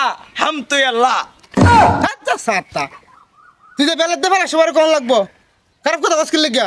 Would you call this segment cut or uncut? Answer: uncut